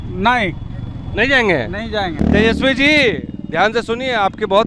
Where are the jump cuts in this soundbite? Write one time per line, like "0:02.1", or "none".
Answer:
0:02.2